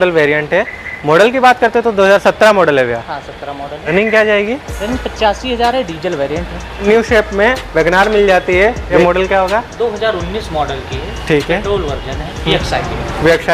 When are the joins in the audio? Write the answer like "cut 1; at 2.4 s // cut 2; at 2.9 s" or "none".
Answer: cut 1; at 3.8 s // cut 2; at 6.8 s // cut 3; at 8.9 s // cut 4; at 12.5 s